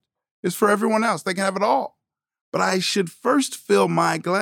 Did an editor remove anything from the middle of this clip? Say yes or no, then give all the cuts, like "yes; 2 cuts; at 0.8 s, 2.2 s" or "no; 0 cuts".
yes; 1 cut; at 2.9 s